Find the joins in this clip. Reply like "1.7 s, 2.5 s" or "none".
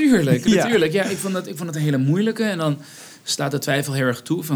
none